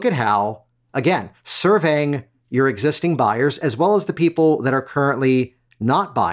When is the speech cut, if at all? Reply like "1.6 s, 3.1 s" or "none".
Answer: none